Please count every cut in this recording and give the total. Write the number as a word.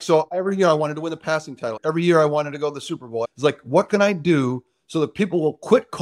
two